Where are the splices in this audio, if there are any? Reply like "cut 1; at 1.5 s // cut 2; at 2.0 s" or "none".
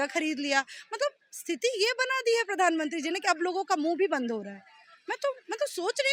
none